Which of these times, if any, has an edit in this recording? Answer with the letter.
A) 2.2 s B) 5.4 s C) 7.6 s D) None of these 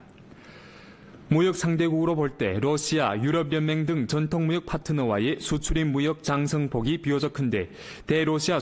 D